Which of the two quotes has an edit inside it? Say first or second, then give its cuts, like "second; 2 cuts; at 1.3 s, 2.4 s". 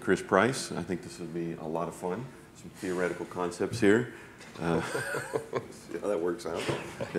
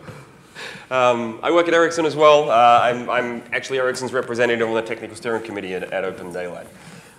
second; 1 cut; at 2.3 s